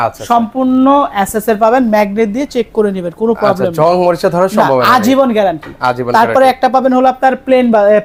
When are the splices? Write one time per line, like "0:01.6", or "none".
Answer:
none